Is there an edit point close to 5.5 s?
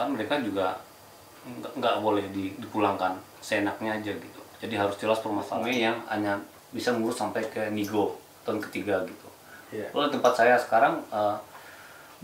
yes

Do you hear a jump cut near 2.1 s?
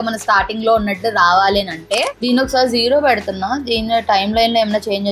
yes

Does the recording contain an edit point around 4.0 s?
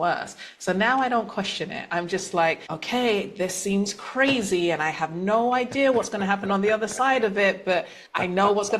no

